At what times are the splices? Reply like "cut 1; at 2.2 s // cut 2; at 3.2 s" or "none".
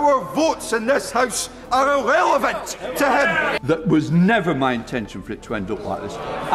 cut 1; at 3.5 s